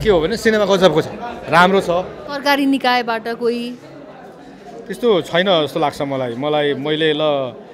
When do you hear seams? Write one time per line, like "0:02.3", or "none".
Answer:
0:02.2